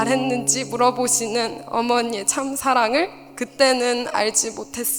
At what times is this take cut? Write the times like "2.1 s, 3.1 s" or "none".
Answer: none